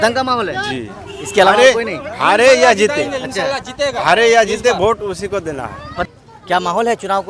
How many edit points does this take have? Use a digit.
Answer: 1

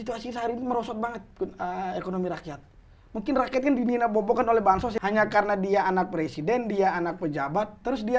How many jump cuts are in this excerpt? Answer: 1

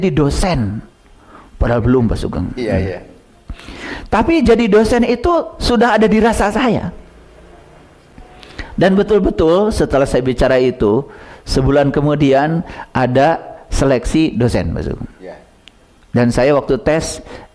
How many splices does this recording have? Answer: 0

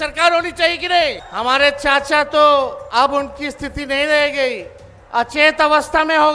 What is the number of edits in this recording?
2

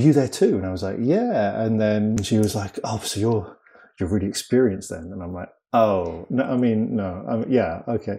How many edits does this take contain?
1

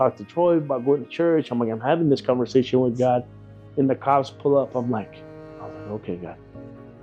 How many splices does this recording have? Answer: 0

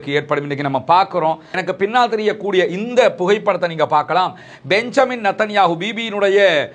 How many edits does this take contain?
1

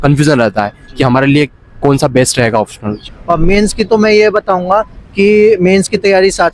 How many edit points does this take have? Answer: 1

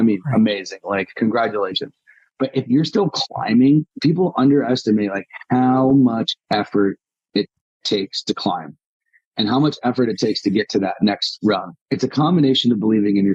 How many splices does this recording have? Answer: 2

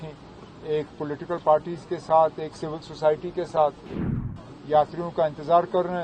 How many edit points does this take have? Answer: 1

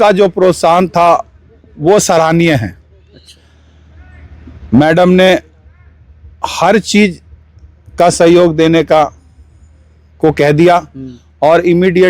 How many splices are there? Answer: 0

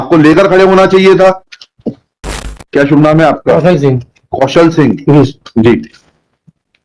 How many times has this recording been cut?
1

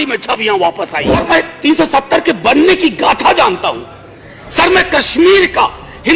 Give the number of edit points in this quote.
1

